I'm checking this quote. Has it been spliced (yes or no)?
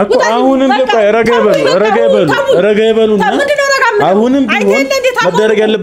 no